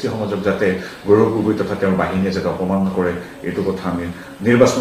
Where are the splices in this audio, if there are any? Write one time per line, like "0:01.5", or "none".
none